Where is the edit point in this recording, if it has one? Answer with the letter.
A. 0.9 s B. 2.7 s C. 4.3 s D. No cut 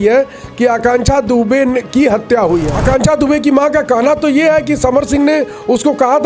B